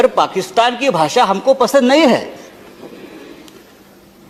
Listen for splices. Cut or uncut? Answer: uncut